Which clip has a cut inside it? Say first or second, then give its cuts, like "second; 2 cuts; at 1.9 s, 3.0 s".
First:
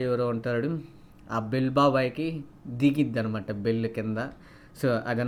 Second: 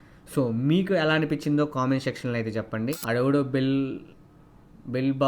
second; 1 cut; at 3.0 s